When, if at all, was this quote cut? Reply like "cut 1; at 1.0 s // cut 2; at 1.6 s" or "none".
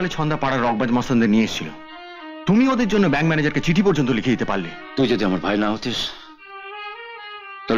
cut 1; at 4.8 s